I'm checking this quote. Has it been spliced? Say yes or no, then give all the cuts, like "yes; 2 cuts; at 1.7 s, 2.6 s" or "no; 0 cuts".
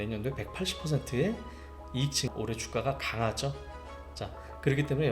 yes; 1 cut; at 2.3 s